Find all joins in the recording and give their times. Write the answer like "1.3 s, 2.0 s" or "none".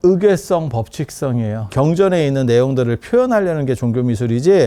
1.7 s